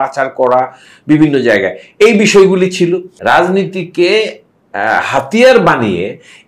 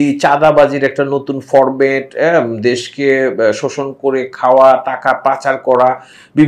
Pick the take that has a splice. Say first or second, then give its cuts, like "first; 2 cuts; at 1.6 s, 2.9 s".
first; 1 cut; at 3.1 s